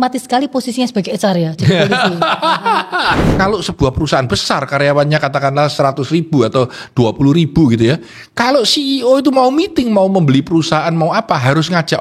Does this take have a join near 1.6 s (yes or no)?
no